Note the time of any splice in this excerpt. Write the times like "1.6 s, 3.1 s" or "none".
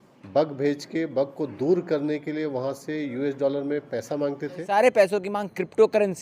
4.6 s

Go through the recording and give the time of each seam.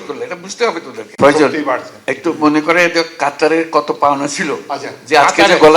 1.0 s

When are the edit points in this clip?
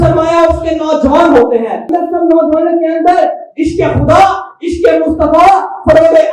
1.9 s

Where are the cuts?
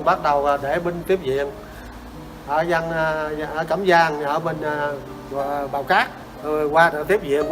6.3 s

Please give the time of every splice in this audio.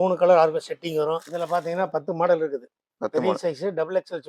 1.3 s

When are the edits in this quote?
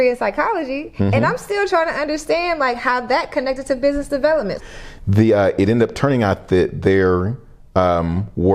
4.6 s

